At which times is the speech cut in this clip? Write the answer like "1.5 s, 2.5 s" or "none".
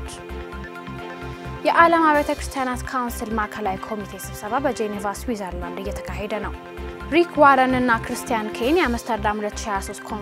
1.0 s